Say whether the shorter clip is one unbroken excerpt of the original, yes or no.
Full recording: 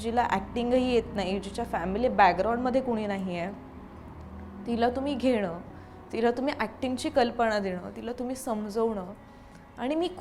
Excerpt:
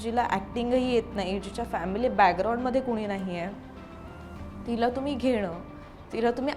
yes